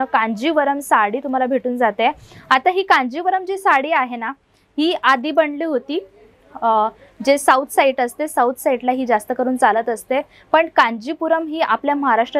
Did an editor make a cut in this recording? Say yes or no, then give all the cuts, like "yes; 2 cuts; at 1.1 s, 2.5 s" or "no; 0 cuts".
no; 0 cuts